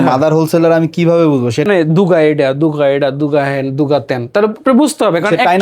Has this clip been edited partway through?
yes; 1 cut; at 1.6 s

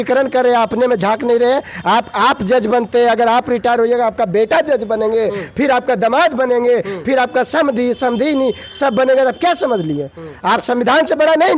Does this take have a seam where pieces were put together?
no; 0 cuts

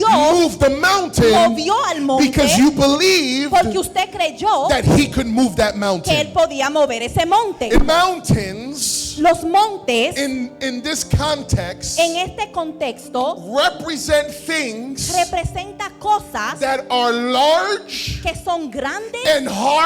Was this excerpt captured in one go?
no; 1 cut; at 7.8 s

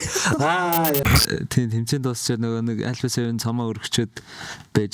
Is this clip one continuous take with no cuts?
no; 1 cut; at 1.0 s

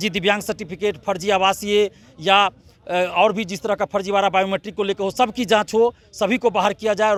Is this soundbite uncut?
yes; 0 cuts

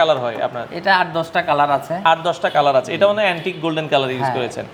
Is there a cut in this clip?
no; 0 cuts

